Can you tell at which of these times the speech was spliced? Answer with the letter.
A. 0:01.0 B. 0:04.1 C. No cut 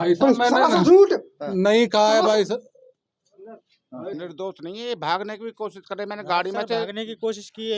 B